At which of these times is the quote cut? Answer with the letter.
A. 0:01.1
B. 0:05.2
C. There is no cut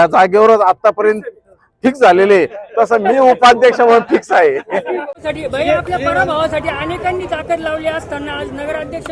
B